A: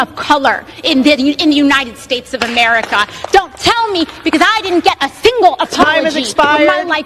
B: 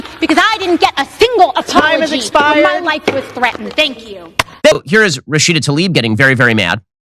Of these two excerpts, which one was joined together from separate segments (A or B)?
B